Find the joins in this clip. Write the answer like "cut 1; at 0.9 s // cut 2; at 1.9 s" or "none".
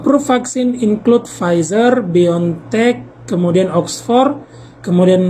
none